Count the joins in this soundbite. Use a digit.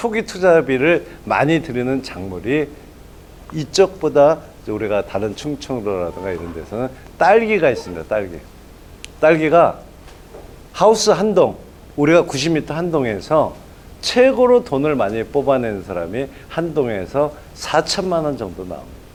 0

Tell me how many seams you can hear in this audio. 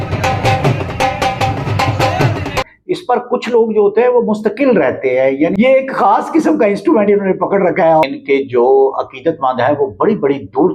3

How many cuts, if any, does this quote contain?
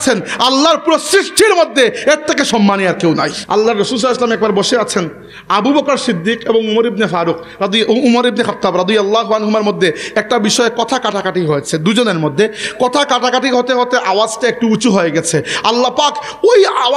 1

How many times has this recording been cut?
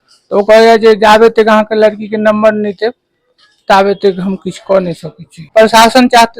1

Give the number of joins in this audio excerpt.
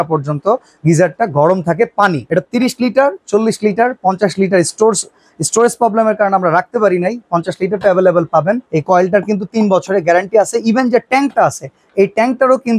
2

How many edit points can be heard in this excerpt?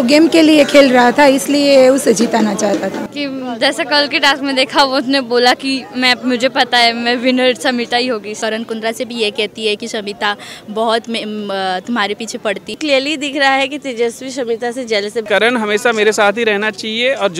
4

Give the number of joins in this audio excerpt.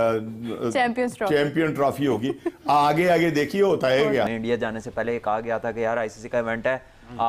1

